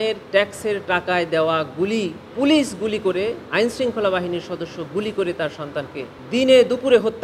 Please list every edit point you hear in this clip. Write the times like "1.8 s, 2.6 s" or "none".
none

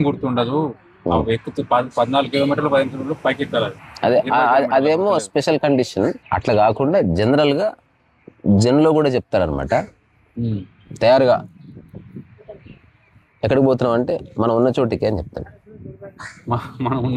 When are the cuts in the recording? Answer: none

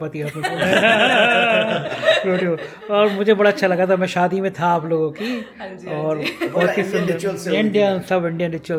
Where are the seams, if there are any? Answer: none

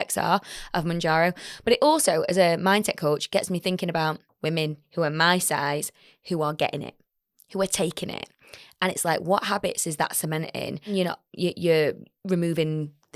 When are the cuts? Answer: 4.3 s, 10.9 s

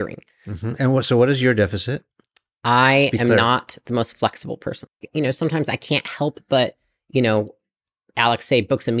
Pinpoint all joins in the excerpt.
5.1 s

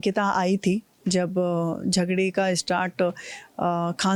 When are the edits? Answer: none

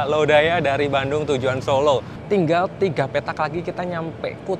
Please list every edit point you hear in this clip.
2.1 s

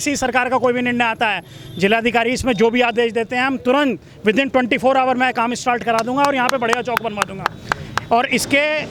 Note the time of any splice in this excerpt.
none

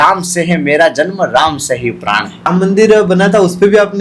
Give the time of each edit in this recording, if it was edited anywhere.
2.5 s

